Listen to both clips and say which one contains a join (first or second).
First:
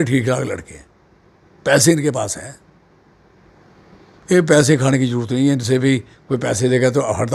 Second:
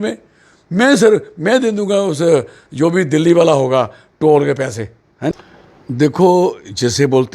second